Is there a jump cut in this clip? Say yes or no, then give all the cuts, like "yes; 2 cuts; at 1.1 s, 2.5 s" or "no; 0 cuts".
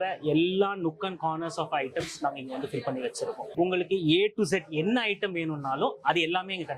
yes; 1 cut; at 3.5 s